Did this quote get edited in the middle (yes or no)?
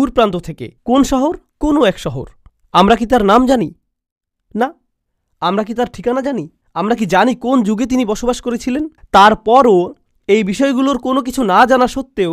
no